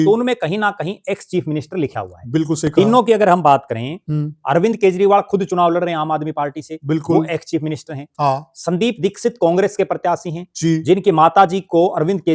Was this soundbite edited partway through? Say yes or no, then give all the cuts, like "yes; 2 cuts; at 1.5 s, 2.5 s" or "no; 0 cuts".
no; 0 cuts